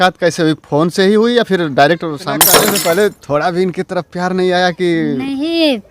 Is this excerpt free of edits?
no; 1 cut; at 2.6 s

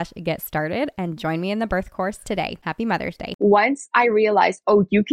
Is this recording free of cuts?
no; 1 cut; at 3.2 s

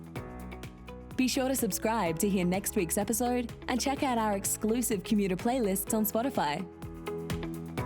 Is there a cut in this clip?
yes; 2 cuts; at 1.1 s, 6.8 s

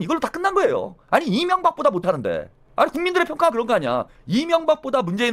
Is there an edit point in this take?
yes; 2 cuts; at 1.0 s, 4.1 s

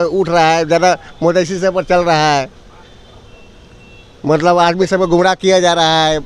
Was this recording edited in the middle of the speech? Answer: no; 0 cuts

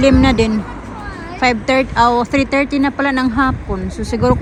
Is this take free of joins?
yes; 0 cuts

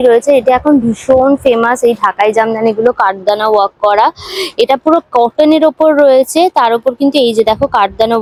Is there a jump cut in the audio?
no; 0 cuts

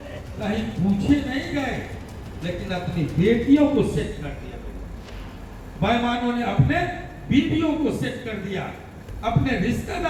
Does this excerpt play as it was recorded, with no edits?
yes; 0 cuts

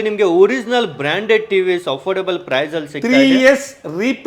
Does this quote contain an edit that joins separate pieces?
no; 0 cuts

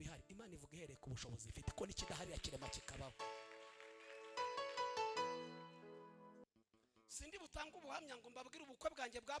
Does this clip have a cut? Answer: yes; 1 cut; at 6.4 s

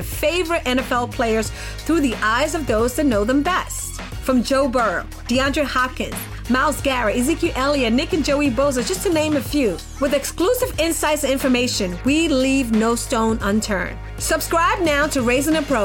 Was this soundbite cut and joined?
no; 0 cuts

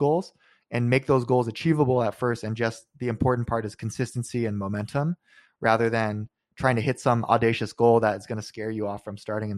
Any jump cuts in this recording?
no; 0 cuts

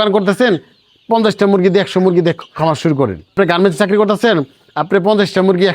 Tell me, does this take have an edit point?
yes; 1 cut; at 3.3 s

